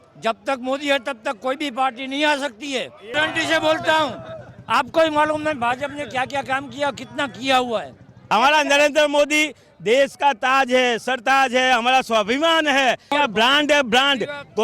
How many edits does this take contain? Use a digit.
3